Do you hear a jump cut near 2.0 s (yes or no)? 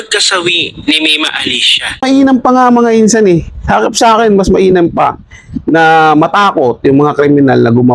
yes